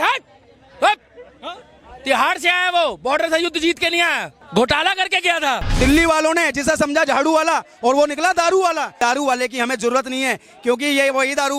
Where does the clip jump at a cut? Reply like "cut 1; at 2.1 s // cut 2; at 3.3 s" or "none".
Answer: cut 1; at 4.3 s // cut 2; at 5.7 s // cut 3; at 8.9 s